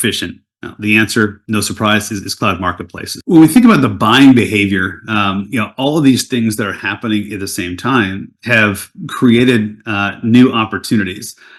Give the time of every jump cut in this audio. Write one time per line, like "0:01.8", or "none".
none